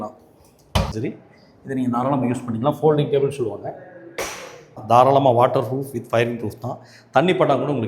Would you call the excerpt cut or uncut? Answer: cut